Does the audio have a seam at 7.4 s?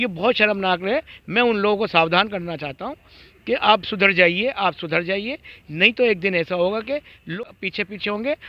yes; 1 cut; at 7.4 s

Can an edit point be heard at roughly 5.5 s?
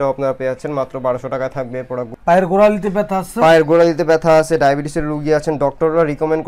no; 1 cut; at 2.1 s

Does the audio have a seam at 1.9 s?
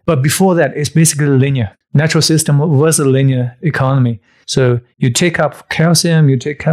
no; 1 cut; at 4.6 s

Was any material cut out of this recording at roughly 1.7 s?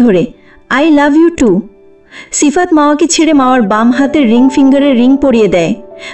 no; 0 cuts

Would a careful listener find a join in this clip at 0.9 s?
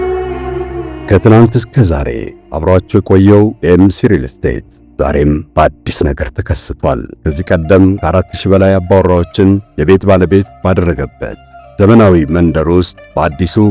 yes; 1 cut; at 0.9 s

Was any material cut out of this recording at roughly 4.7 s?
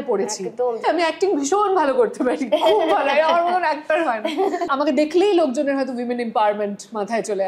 yes; 2 cuts; at 0.8 s, 4.7 s

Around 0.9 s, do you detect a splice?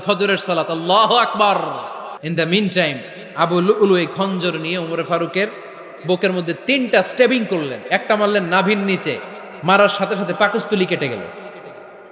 no; 1 cut; at 2.2 s

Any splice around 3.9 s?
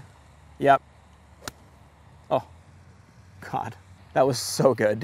yes; 1 cut; at 3.9 s

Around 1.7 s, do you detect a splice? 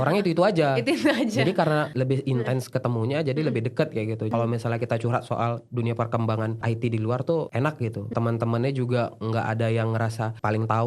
no; 2 cuts; at 4.3 s, 8.1 s

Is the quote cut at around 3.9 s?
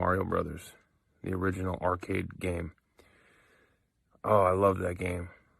no; 2 cuts; at 1.1 s, 2.3 s

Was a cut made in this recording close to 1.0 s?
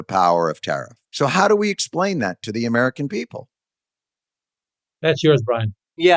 yes; 1 cut; at 1.0 s

